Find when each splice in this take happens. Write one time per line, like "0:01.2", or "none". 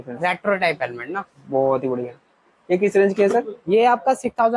none